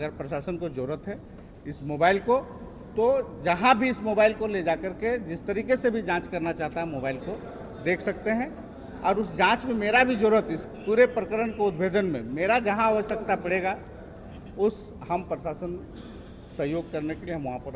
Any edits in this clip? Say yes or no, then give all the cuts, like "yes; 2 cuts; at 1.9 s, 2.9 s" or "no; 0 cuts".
no; 0 cuts